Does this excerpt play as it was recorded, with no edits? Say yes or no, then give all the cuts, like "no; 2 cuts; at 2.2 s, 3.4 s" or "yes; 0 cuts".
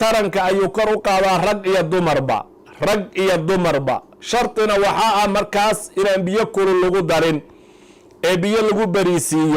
yes; 0 cuts